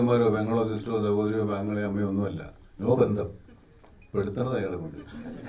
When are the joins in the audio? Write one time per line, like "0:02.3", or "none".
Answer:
none